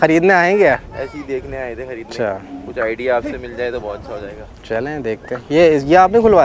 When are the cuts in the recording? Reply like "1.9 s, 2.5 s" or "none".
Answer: none